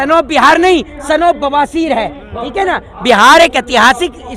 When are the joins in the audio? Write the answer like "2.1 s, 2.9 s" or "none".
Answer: none